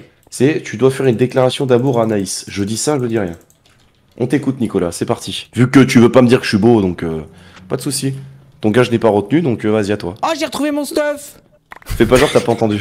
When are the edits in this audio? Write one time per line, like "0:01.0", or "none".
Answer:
none